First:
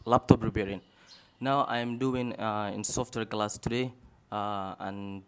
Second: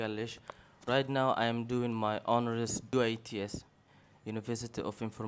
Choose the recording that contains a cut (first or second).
second